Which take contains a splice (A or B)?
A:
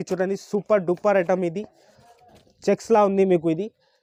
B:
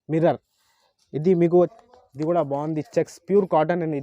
B